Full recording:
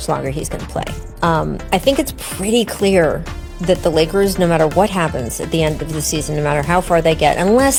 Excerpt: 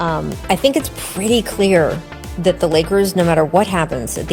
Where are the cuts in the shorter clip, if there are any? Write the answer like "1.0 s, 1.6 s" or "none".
none